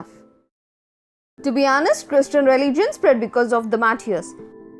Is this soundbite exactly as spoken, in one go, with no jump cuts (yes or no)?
no